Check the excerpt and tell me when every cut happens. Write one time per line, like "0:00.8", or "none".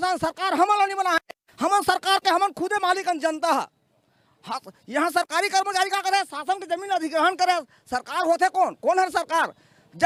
none